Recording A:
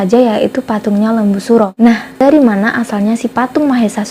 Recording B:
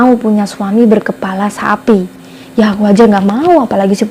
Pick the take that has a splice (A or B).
A